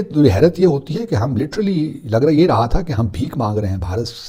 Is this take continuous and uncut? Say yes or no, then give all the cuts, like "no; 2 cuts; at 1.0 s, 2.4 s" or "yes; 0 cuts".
yes; 0 cuts